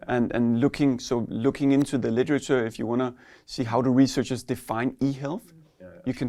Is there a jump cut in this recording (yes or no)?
no